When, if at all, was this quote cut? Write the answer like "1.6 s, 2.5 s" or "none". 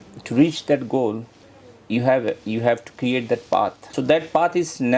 3.8 s